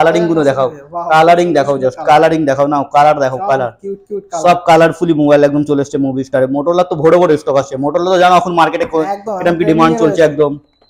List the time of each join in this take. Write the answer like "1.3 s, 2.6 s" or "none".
none